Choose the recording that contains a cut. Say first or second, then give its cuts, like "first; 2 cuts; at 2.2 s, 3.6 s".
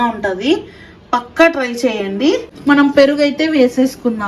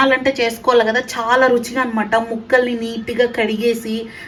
first; 1 cut; at 2.5 s